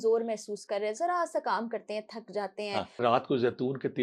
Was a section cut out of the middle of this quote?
yes; 1 cut; at 3.0 s

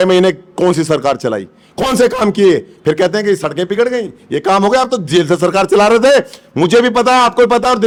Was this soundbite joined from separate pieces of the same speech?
no; 0 cuts

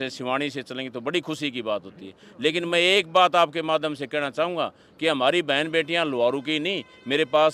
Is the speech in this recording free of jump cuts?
yes; 0 cuts

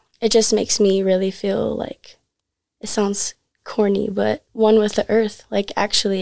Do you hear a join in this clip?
no; 0 cuts

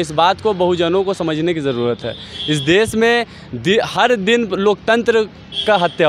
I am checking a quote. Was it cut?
no; 0 cuts

